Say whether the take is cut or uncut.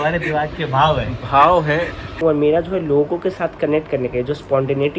cut